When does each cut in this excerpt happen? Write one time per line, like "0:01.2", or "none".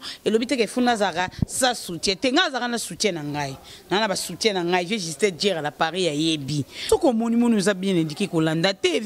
0:06.7